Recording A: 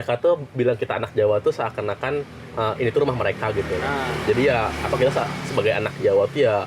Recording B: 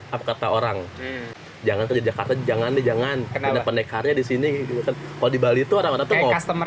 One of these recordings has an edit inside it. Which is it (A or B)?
B